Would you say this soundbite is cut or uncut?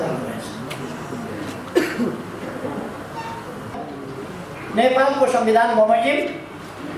cut